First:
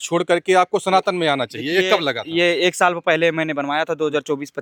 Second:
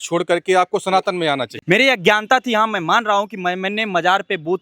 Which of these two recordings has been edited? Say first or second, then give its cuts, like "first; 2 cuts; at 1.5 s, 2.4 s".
second; 1 cut; at 1.5 s